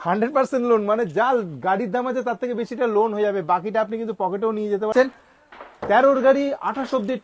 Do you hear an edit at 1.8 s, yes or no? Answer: no